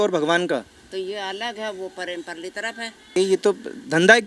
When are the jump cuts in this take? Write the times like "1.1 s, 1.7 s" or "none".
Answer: 3.2 s